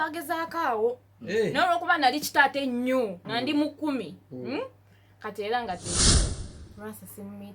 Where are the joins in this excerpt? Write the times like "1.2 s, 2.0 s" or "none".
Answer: 6.3 s